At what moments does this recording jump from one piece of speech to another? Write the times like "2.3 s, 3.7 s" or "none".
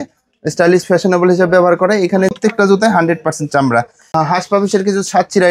2.4 s, 4.0 s